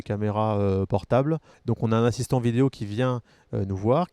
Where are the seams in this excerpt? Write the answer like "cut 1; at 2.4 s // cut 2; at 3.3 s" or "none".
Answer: cut 1; at 1.5 s